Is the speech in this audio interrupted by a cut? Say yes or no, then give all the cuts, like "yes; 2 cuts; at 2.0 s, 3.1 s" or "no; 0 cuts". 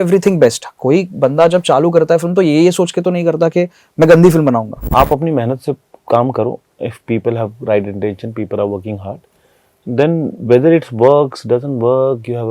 yes; 1 cut; at 4.8 s